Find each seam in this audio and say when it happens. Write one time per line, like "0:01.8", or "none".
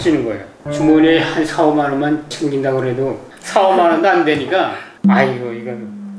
none